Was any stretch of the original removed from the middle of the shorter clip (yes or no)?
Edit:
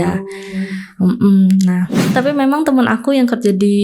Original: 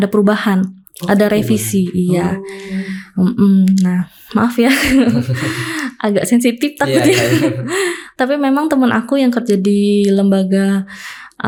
yes